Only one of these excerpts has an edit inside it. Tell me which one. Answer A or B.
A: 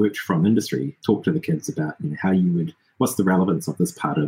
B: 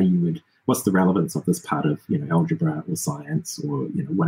A